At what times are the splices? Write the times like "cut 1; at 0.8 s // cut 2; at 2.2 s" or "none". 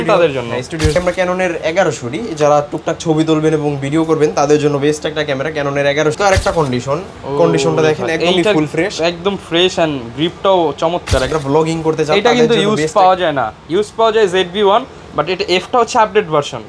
cut 1; at 1.0 s // cut 2; at 6.2 s // cut 3; at 11.3 s